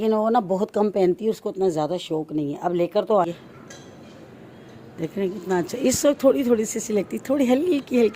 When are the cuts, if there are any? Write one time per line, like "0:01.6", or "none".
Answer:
0:03.2